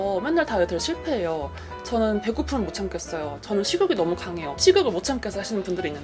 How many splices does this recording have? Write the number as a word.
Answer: zero